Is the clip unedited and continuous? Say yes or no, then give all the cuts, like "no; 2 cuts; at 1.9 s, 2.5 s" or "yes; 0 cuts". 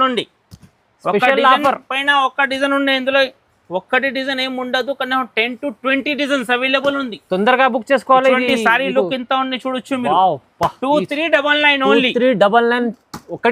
yes; 0 cuts